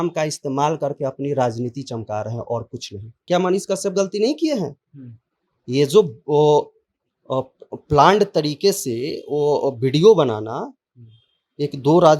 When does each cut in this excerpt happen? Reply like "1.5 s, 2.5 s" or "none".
3.1 s

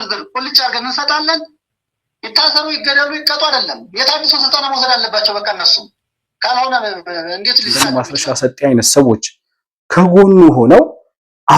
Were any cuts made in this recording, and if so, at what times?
7.8 s

